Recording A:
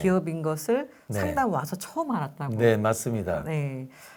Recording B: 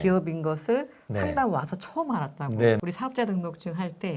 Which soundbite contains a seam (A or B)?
B